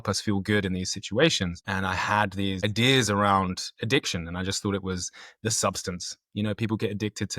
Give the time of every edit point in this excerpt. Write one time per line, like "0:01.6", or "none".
0:01.6
0:02.6

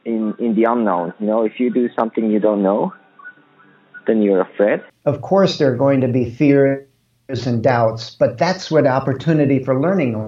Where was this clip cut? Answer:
0:04.9

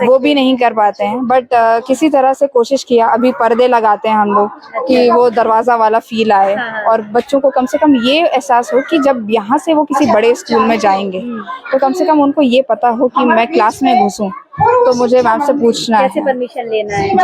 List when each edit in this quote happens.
none

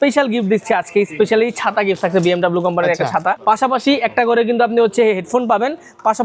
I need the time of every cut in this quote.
0:03.4

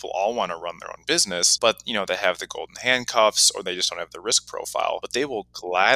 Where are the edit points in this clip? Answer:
0:01.5
0:05.1

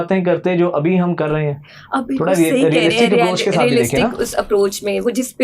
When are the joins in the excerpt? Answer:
none

